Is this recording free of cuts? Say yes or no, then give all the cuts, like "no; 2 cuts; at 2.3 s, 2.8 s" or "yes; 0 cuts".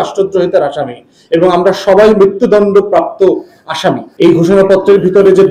no; 1 cut; at 4.1 s